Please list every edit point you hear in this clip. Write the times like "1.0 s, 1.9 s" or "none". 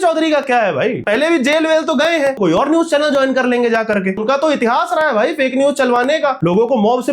1.0 s, 2.4 s, 4.2 s, 6.4 s